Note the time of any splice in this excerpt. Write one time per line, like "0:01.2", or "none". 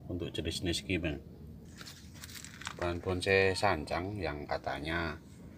0:01.7